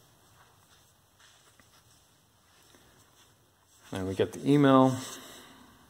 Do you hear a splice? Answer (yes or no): no